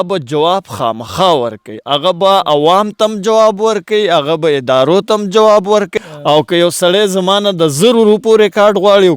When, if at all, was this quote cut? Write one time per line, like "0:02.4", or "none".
0:05.9